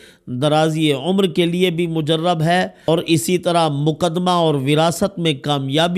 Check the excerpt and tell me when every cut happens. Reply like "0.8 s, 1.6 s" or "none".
2.8 s